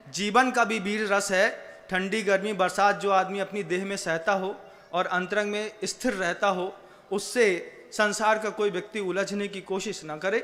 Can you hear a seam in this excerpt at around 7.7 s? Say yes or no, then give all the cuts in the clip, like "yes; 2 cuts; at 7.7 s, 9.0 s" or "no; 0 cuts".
no; 0 cuts